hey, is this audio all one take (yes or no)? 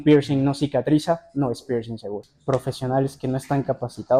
no